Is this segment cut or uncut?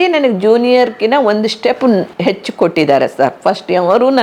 cut